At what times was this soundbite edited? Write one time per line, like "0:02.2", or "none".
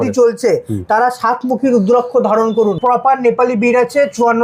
0:02.8